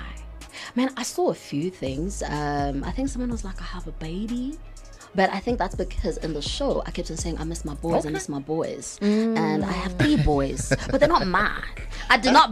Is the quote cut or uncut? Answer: uncut